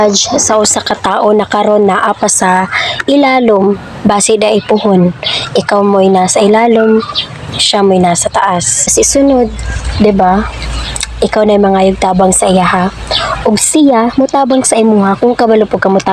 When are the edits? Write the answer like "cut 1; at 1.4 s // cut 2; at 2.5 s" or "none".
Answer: cut 1; at 8.9 s